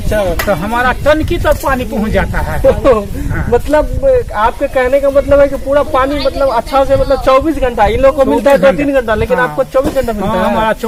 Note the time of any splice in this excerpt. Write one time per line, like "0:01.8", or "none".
none